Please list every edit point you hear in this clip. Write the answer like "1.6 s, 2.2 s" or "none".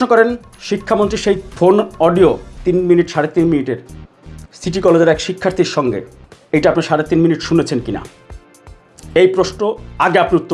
1.5 s, 2.5 s

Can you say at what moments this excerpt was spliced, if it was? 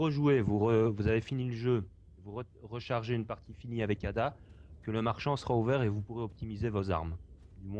1.7 s

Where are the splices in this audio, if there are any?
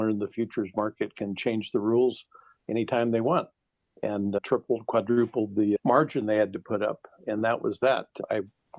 none

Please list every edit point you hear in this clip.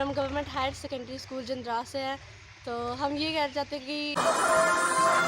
4.2 s

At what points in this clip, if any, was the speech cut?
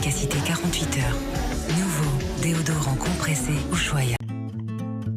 4.1 s

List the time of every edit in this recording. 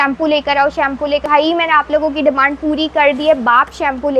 1.2 s

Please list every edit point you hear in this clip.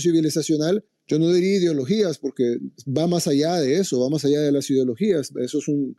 0.9 s

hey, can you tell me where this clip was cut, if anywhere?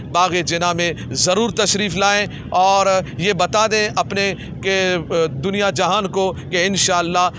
none

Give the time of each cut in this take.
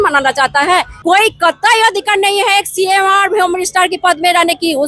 0.9 s

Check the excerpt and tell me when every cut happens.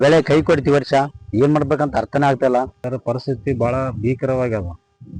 2.8 s

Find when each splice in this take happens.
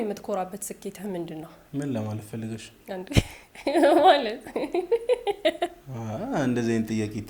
1.6 s

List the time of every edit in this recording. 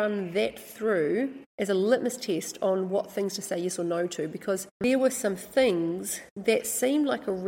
1.4 s, 4.8 s

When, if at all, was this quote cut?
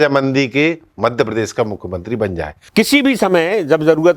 2.6 s

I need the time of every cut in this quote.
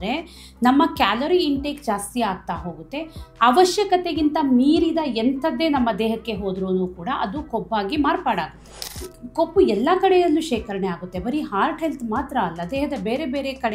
8.8 s

